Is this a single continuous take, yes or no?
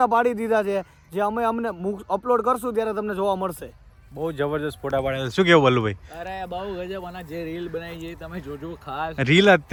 yes